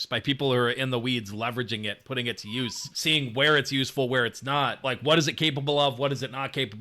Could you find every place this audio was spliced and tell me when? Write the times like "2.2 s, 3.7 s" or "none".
2.9 s, 4.8 s